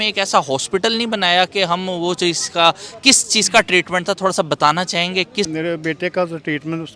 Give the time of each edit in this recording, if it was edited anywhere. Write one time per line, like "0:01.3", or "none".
0:05.5

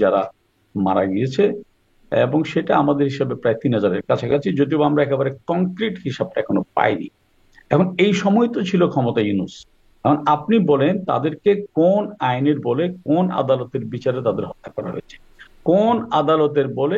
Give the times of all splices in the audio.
none

